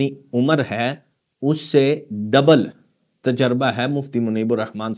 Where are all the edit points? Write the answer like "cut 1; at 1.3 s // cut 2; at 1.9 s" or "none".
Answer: none